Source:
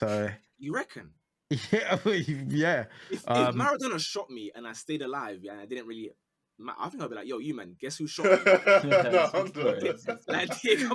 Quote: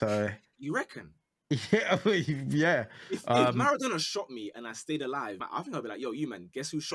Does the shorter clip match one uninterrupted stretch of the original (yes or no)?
no